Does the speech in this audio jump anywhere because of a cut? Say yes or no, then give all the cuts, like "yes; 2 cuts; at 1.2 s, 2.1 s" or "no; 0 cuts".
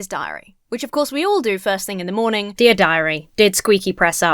yes; 1 cut; at 2.5 s